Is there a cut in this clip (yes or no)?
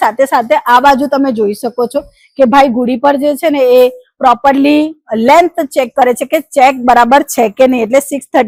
no